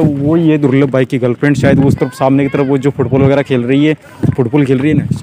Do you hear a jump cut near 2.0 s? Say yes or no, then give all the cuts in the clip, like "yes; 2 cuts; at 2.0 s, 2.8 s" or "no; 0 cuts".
no; 1 cut; at 4.3 s